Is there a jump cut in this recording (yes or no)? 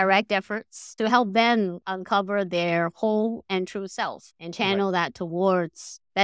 yes